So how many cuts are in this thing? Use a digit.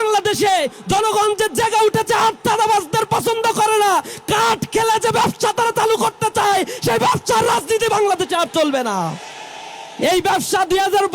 0